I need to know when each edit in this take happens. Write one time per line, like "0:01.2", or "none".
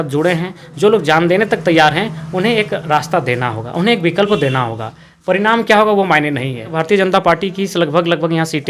0:06.7